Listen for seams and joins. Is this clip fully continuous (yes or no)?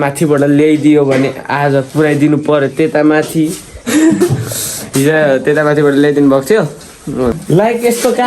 no